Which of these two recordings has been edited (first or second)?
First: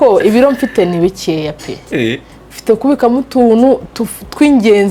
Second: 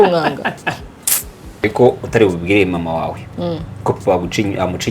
second